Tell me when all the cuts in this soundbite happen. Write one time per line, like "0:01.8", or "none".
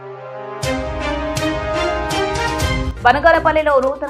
0:02.9